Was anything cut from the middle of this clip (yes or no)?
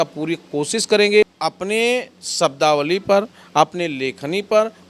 yes